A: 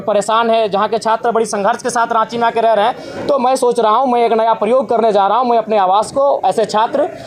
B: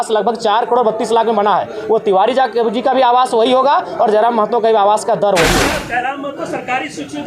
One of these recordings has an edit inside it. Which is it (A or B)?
B